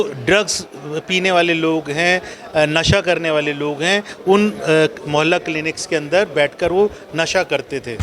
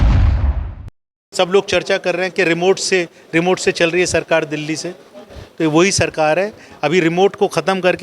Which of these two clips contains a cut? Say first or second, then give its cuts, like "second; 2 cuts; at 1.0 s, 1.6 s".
second; 1 cut; at 1.2 s